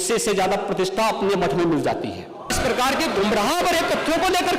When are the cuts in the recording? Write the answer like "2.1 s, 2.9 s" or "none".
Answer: 2.5 s